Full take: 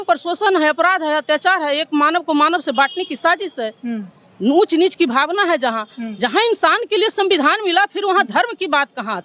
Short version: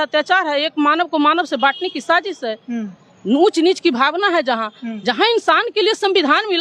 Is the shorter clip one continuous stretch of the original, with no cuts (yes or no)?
yes